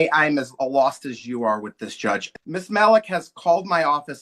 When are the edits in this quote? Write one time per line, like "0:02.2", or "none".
0:02.3